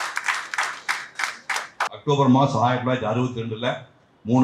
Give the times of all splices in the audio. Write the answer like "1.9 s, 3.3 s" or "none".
1.9 s